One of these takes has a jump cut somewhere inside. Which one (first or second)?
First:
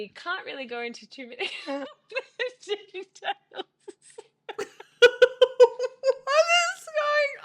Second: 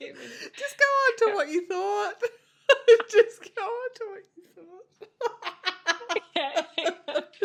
first